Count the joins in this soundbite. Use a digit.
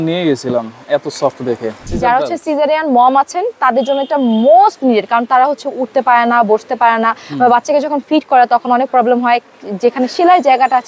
1